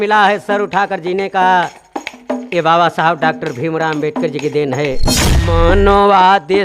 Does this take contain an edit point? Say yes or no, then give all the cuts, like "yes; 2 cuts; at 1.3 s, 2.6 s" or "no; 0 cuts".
yes; 1 cut; at 5.4 s